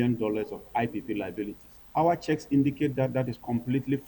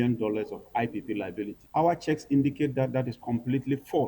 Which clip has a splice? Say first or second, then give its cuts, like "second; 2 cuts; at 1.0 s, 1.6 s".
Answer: second; 1 cut; at 1.6 s